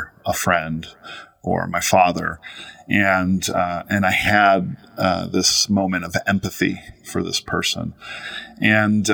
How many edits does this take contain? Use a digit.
0